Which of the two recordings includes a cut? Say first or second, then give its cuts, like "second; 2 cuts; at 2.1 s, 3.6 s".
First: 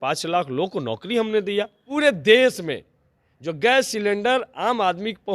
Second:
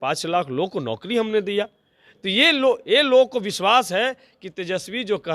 first; 1 cut; at 1.8 s